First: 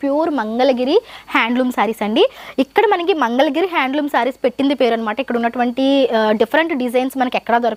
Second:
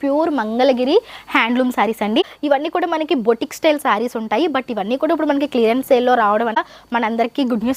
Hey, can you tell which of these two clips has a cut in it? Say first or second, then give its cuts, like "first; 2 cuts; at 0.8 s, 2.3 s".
second; 2 cuts; at 2.2 s, 6.6 s